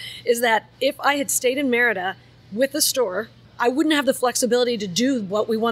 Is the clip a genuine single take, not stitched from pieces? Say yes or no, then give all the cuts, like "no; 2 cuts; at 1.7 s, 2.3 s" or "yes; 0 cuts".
no; 1 cut; at 3.4 s